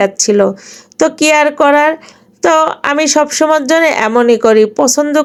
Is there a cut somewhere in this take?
no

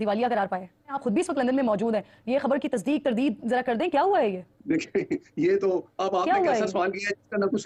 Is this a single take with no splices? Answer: yes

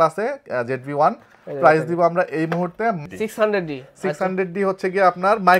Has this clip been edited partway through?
yes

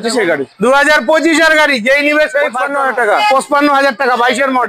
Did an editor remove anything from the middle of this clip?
yes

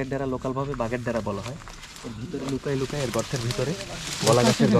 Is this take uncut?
yes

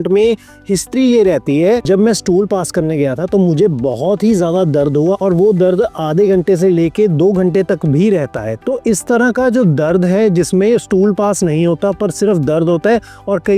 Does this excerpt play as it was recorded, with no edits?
no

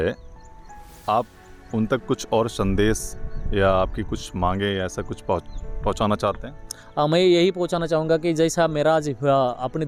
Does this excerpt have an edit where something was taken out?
no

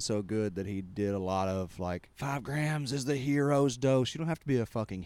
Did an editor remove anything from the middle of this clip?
yes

